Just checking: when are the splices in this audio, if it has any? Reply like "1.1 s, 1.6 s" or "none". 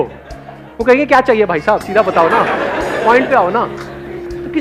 none